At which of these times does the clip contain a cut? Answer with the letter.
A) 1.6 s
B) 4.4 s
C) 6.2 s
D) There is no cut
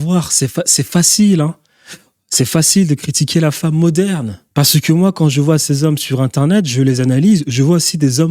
B